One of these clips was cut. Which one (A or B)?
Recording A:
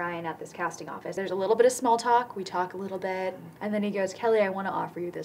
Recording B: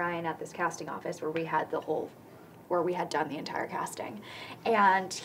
A